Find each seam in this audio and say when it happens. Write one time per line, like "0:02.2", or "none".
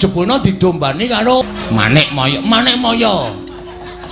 0:01.4